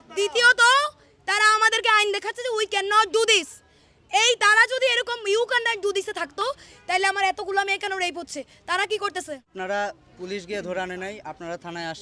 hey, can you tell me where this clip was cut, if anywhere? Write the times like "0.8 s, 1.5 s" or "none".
9.5 s

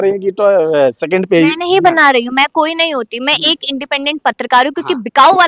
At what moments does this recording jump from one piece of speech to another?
none

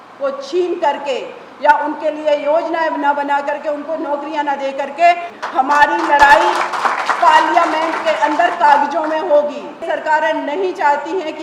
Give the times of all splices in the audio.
5.3 s, 9.8 s

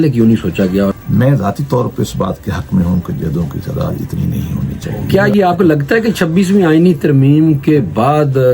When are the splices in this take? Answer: 1.0 s, 4.9 s

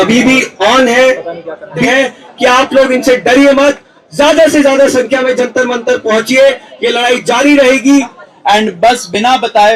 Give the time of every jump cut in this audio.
1.9 s, 8.2 s

